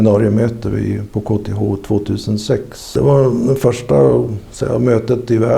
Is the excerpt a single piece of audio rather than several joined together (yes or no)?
no